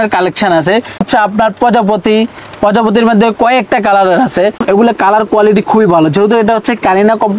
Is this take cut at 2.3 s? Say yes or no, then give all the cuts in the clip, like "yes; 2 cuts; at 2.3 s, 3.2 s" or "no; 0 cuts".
no; 2 cuts; at 1.0 s, 4.6 s